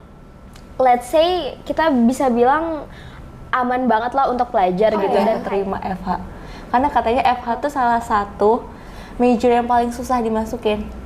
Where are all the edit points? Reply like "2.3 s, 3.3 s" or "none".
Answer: 5.4 s